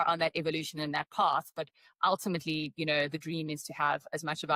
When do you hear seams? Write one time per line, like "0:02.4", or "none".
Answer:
none